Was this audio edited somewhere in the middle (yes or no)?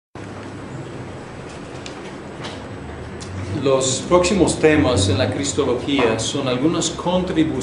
no